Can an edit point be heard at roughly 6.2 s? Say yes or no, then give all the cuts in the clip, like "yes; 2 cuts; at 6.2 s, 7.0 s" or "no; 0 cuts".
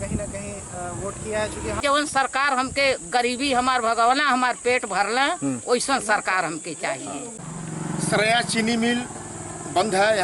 no; 2 cuts; at 1.8 s, 7.4 s